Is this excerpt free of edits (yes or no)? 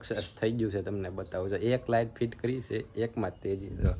yes